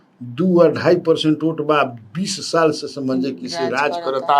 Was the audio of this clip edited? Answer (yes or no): no